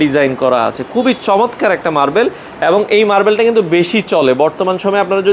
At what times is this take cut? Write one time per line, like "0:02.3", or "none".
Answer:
none